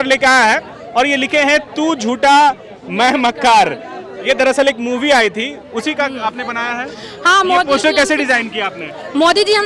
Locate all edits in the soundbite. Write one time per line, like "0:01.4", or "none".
none